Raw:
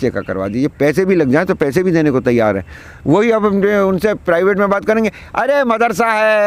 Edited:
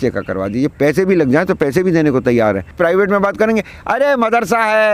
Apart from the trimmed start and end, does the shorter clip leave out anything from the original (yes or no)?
yes